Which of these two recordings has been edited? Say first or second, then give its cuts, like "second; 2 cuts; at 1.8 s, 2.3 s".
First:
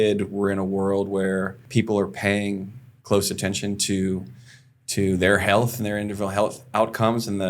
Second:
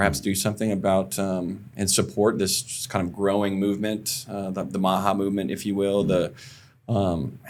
first; 1 cut; at 1.6 s